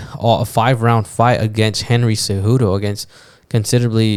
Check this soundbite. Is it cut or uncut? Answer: uncut